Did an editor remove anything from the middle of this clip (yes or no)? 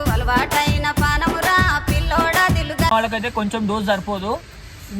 yes